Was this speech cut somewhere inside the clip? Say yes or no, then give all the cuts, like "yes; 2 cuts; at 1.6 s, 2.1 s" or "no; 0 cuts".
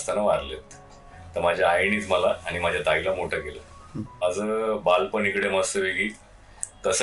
yes; 1 cut; at 4.2 s